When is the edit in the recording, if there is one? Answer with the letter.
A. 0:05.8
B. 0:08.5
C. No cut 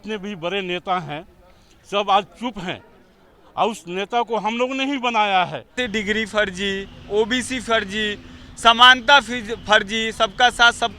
A